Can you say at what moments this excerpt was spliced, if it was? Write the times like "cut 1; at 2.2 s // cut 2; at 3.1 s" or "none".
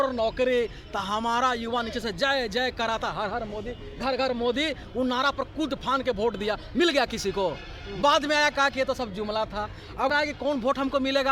cut 1; at 10.1 s